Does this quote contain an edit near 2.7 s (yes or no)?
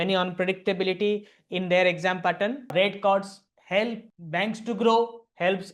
yes